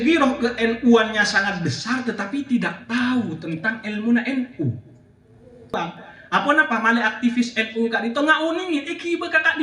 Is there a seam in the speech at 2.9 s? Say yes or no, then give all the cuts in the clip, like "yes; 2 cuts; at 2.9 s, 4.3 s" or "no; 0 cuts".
no; 1 cut; at 5.8 s